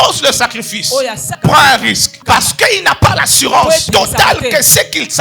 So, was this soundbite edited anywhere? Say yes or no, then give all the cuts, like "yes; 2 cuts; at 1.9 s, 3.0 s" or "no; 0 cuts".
yes; 3 cuts; at 1.3 s, 2.1 s, 3.9 s